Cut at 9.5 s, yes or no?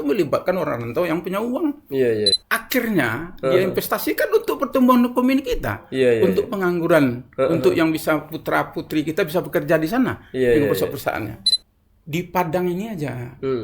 no